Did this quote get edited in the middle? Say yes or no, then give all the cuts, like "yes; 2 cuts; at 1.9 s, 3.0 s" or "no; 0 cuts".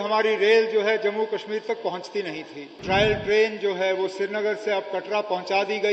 yes; 1 cut; at 2.7 s